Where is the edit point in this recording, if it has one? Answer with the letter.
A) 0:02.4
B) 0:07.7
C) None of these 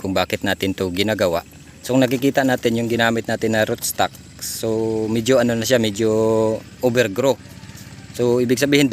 C